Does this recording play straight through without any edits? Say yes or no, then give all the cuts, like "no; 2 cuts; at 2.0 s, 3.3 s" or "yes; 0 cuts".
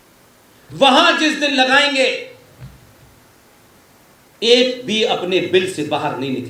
yes; 0 cuts